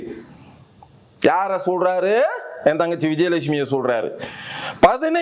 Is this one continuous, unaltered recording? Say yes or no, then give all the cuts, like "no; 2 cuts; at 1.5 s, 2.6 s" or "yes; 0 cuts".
yes; 0 cuts